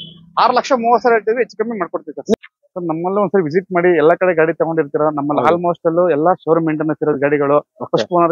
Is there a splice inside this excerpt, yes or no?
yes